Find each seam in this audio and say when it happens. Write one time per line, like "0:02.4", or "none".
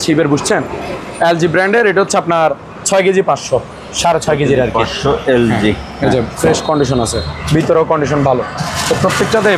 none

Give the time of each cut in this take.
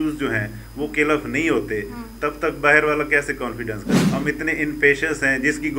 0:03.8

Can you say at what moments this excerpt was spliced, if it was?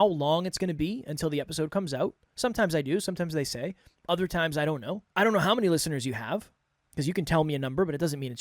0:05.1

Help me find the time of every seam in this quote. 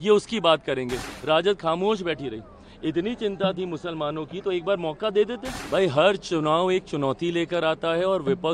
0:01.1
0:05.5

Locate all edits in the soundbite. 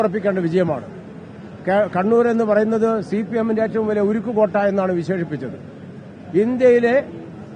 none

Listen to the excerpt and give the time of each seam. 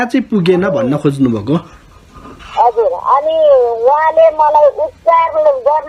none

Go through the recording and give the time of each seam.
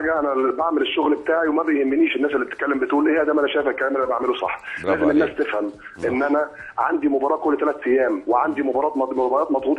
0:08.5

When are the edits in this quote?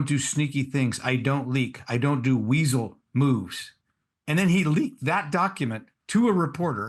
none

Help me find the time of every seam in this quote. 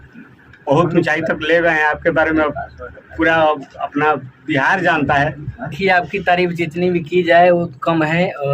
0:05.7

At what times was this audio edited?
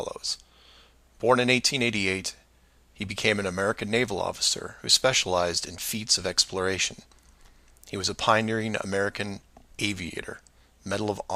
none

